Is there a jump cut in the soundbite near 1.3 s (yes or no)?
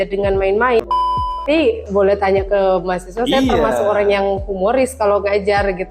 yes